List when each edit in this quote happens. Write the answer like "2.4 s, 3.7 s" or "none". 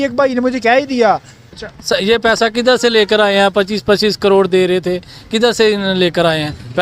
1.4 s

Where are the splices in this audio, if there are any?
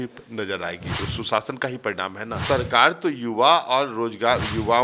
1.0 s, 2.4 s

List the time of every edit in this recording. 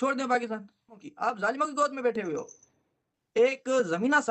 1.0 s, 3.1 s

